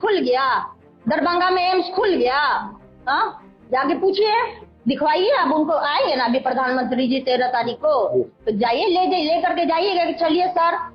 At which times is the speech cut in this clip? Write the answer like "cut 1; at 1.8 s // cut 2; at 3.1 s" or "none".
none